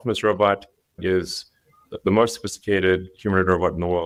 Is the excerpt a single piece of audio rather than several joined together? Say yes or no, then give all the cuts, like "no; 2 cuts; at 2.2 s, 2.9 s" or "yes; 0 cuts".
yes; 0 cuts